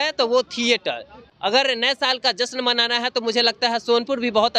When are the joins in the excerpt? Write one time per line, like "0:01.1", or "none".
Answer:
0:01.2